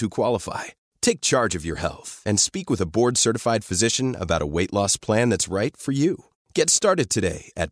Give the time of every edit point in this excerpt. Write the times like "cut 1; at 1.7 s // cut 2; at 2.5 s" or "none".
none